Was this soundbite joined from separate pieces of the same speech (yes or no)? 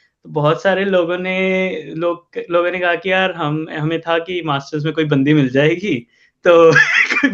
no